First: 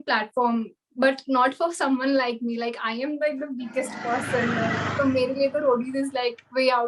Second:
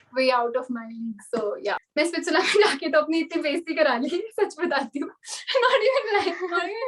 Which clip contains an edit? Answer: second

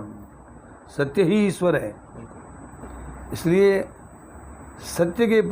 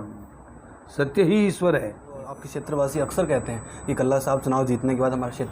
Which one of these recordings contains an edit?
second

